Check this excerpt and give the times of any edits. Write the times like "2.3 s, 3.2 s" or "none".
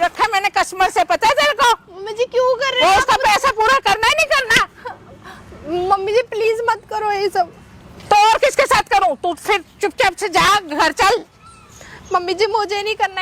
none